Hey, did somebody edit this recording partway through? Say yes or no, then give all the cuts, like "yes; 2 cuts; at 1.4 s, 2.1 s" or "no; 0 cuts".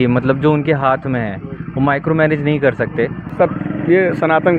yes; 1 cut; at 3.2 s